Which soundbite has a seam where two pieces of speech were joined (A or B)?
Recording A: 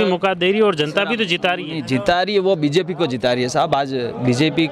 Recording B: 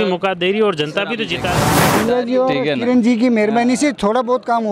B